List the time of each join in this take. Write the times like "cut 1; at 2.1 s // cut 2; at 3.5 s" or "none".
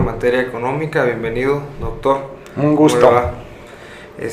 cut 1; at 1.6 s